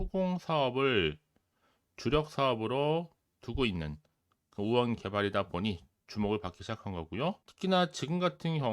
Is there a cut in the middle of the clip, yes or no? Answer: yes